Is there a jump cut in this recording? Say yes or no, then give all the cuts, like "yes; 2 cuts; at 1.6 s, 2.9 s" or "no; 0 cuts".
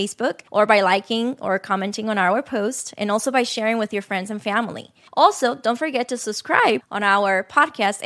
no; 0 cuts